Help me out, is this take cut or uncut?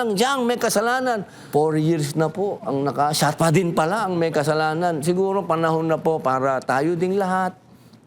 cut